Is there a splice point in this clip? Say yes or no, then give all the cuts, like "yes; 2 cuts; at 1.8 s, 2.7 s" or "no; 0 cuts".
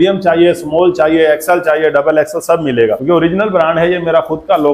yes; 1 cut; at 3.0 s